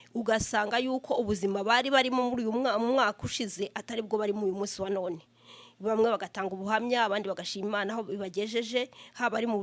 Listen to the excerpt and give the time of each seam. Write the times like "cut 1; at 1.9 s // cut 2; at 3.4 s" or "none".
none